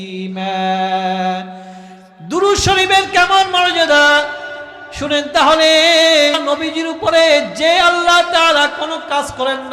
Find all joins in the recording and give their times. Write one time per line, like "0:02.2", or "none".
0:06.4